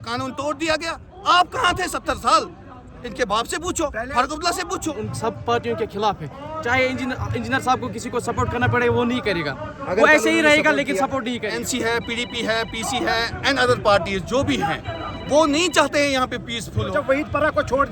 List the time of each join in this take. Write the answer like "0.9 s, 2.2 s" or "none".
5.1 s, 11.6 s, 16.9 s